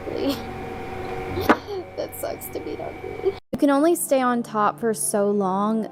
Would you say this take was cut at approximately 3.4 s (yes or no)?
yes